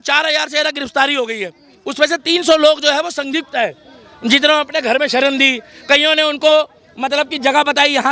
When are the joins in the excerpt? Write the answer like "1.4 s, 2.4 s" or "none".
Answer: none